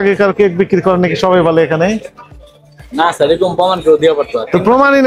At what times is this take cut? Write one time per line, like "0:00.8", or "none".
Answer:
none

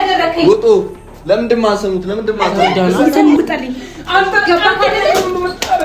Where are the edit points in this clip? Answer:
0:03.4

